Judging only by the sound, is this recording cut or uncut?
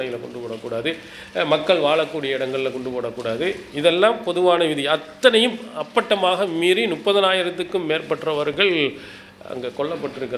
uncut